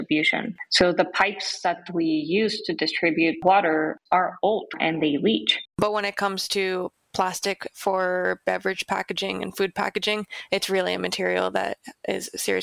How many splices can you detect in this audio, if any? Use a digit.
2